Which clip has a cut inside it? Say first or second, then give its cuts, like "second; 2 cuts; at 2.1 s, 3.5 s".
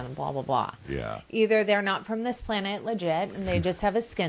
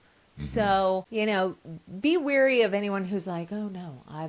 second; 1 cut; at 1.1 s